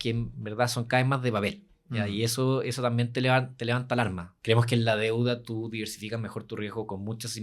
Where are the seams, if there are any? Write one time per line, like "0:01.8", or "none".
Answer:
0:04.3